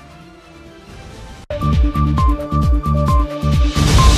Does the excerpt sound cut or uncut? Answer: cut